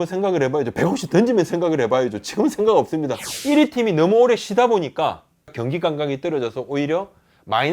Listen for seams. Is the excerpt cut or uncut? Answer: cut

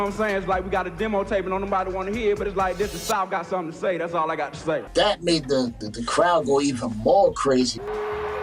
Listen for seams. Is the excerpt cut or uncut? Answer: uncut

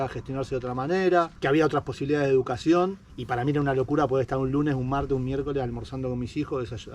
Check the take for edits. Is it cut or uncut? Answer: cut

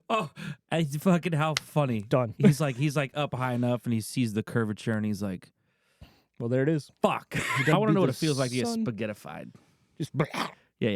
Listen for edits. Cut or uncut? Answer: cut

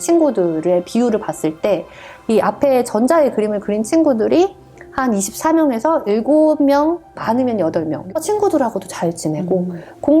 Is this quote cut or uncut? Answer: cut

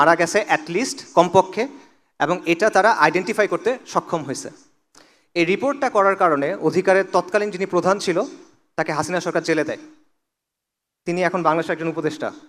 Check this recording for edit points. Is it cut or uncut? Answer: uncut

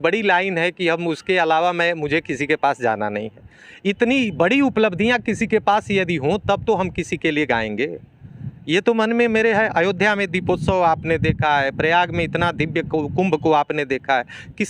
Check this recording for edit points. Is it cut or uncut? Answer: uncut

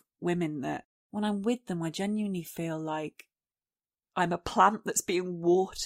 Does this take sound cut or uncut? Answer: cut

